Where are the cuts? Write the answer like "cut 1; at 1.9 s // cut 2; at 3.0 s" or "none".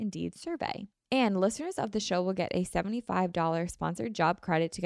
cut 1; at 0.9 s